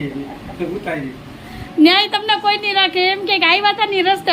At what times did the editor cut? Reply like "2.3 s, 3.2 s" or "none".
1.7 s